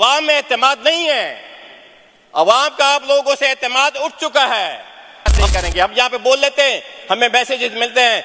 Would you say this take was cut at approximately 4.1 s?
no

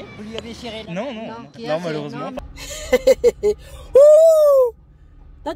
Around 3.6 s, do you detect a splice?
no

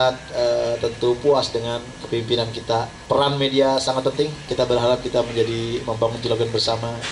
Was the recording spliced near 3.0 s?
yes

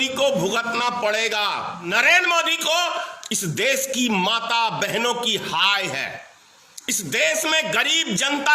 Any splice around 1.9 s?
yes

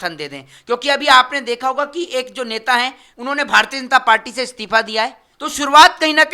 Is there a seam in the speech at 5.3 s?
yes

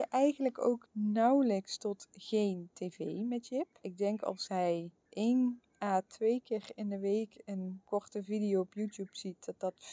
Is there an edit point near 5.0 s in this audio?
yes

